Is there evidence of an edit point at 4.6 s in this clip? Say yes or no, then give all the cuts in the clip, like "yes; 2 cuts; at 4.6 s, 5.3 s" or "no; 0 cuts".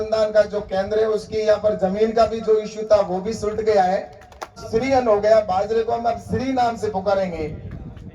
yes; 1 cut; at 4.6 s